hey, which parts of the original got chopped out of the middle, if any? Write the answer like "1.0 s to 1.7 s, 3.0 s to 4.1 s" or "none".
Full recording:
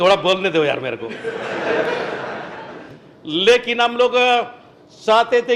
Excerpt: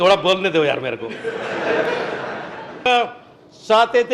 2.9 s to 4.2 s